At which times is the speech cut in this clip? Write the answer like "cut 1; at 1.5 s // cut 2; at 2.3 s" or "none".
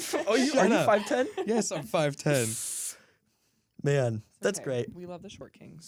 none